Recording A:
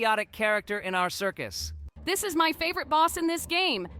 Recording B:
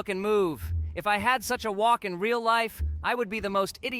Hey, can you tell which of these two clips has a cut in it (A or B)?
A